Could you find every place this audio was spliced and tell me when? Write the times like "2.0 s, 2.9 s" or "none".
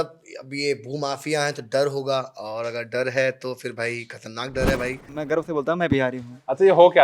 5.1 s